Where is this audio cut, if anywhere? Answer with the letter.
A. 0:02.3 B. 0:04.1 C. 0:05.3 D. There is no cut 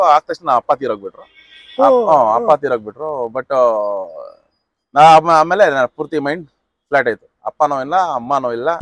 D